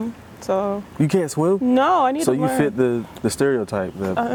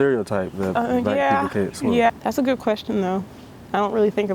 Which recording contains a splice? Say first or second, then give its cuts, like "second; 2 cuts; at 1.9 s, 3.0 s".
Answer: second; 1 cut; at 2.1 s